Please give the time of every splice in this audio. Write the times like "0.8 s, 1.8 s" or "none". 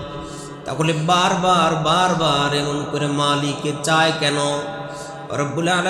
none